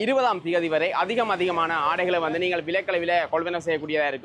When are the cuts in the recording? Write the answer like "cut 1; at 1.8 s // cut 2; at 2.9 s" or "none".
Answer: none